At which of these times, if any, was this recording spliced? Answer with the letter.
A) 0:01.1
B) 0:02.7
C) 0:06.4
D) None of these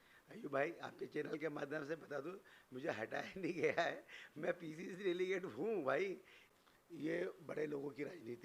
C